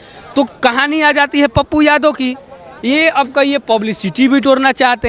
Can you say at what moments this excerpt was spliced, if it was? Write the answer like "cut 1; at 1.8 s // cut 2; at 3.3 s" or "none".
none

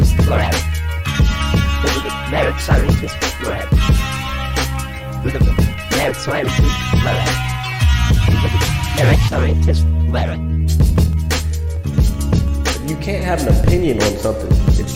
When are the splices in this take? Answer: none

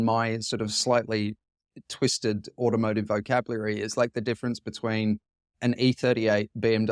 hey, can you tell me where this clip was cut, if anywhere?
none

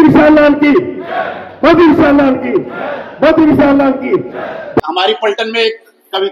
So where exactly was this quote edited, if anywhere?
cut 1; at 4.8 s

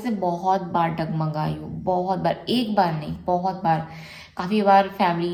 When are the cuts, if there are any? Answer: none

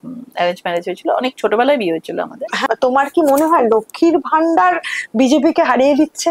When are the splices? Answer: cut 1; at 2.7 s

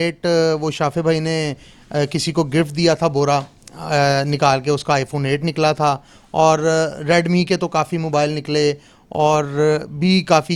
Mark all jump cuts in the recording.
none

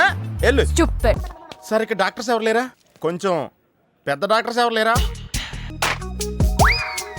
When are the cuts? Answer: cut 1; at 1.3 s // cut 2; at 2.8 s // cut 3; at 5.6 s

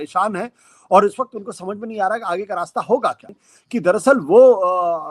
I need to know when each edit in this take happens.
cut 1; at 3.4 s

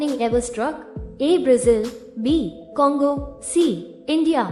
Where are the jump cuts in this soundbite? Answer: none

